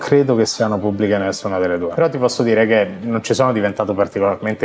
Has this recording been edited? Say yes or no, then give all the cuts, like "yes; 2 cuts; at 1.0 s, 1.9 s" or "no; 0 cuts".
no; 0 cuts